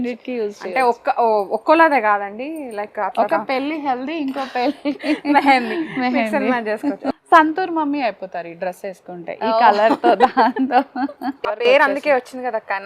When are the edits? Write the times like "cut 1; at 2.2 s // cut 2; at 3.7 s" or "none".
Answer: cut 1; at 7.0 s // cut 2; at 11.6 s

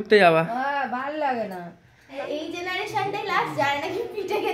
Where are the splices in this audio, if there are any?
cut 1; at 2.2 s

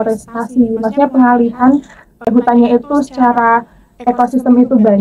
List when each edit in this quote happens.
cut 1; at 2.3 s

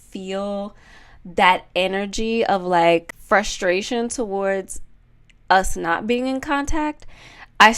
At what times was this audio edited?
cut 1; at 3.1 s

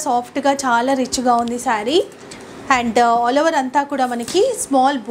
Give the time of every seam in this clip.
none

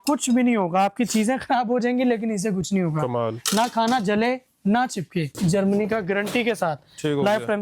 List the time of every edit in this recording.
cut 1; at 5.3 s

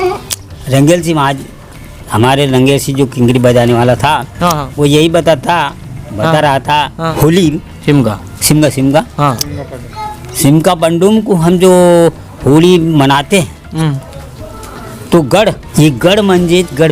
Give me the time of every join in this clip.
cut 1; at 7.1 s // cut 2; at 15.6 s

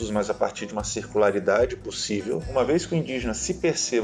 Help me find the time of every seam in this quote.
cut 1; at 2.5 s

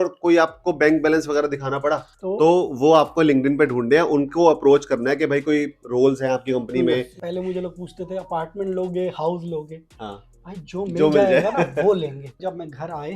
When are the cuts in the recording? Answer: cut 1; at 2.1 s // cut 2; at 7.2 s // cut 3; at 12.3 s

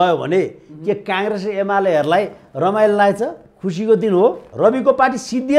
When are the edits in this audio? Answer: cut 1; at 4.5 s

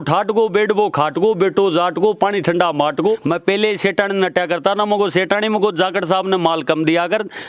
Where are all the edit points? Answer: cut 1; at 3.2 s

